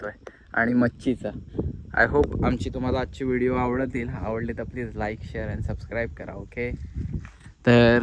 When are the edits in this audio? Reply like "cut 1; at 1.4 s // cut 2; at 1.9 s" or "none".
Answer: none